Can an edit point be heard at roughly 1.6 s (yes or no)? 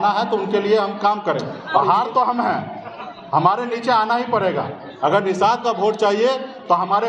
yes